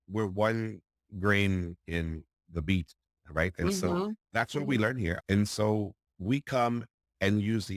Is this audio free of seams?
yes; 0 cuts

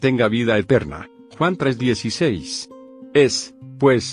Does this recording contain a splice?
yes; 1 cut; at 3.0 s

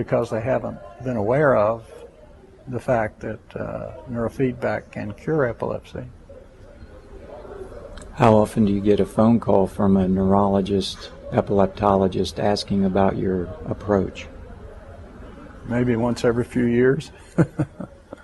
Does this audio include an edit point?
no; 0 cuts

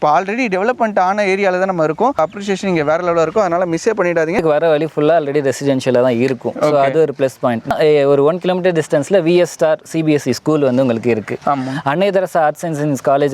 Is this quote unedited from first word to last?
no; 3 cuts; at 2.2 s, 4.4 s, 7.7 s

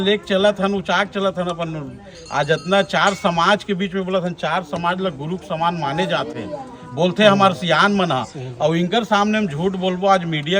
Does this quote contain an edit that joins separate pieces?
no; 0 cuts

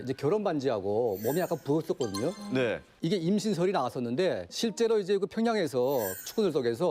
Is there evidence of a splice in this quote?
no; 0 cuts

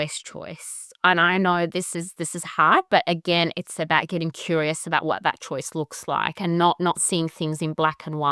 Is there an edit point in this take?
no; 0 cuts

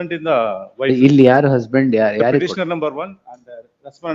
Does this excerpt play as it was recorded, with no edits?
yes; 0 cuts

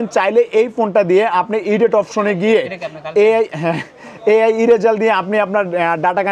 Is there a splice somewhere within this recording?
no; 0 cuts

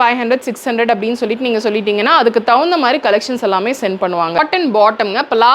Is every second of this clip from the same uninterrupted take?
no; 1 cut; at 4.4 s

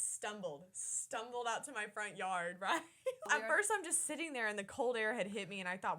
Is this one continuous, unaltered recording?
no; 1 cut; at 3.3 s

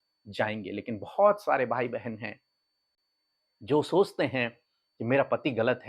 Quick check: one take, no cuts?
yes; 0 cuts

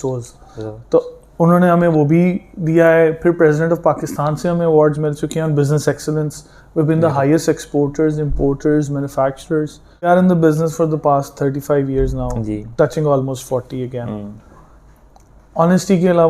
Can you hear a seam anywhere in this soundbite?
yes; 1 cut; at 10.1 s

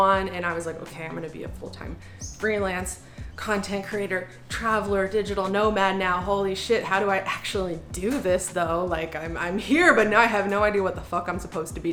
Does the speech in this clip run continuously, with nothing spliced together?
yes; 0 cuts

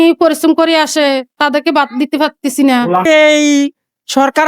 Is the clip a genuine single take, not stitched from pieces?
no; 1 cut; at 3.0 s

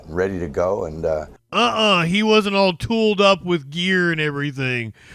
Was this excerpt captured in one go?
no; 1 cut; at 1.4 s

